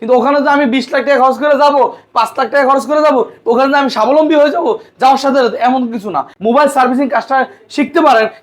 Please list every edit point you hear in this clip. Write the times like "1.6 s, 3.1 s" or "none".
6.3 s